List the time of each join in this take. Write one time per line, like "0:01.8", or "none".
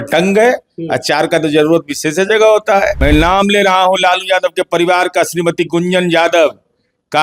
0:03.0